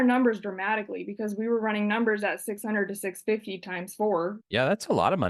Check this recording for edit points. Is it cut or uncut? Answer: cut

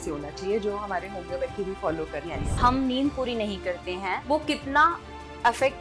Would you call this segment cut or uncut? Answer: cut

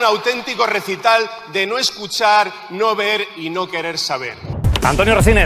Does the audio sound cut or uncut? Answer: cut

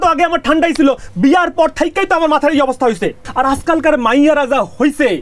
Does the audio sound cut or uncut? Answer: cut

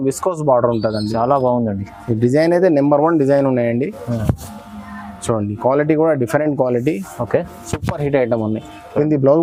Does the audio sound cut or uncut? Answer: uncut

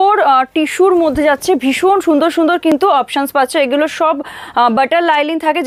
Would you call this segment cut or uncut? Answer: uncut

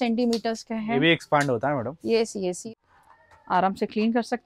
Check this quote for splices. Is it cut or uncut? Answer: cut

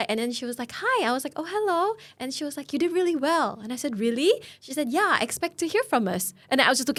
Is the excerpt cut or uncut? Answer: uncut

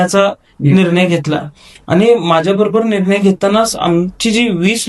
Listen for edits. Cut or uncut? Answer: uncut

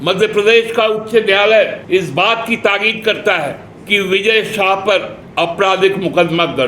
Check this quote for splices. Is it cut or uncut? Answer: cut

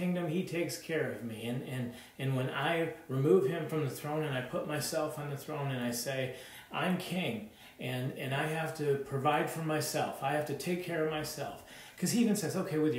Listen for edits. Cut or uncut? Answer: uncut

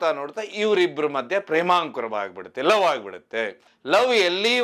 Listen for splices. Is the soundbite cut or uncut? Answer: cut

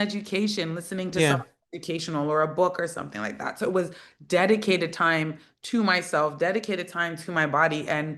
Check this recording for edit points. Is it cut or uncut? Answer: uncut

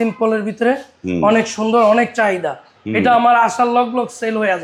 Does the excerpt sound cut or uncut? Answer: uncut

